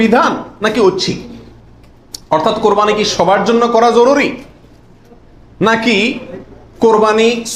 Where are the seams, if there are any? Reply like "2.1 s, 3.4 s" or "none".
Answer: none

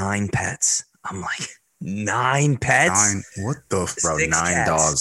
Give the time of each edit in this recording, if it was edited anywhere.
4.0 s

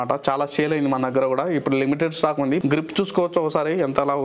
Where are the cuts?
2.6 s

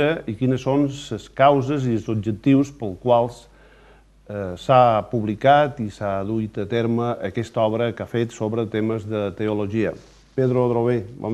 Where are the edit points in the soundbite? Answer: 1.2 s

